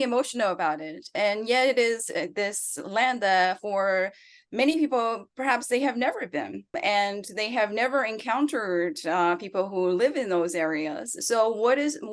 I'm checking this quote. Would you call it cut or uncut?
cut